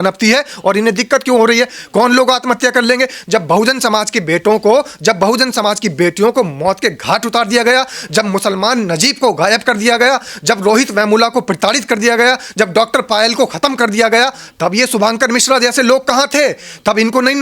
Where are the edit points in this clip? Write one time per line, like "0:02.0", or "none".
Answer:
none

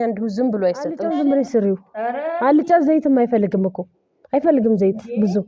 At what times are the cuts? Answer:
0:01.0

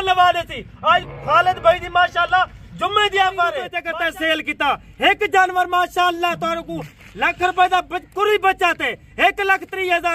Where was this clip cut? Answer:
0:03.7

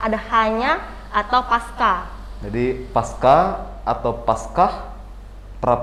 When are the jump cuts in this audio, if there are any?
none

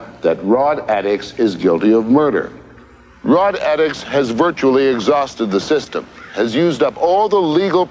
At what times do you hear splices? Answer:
none

